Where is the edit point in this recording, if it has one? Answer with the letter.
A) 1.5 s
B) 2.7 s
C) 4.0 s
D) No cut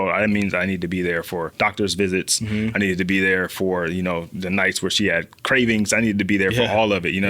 A